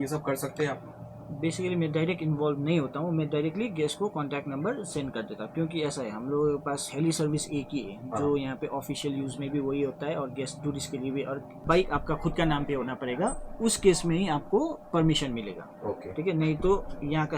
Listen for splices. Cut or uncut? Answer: cut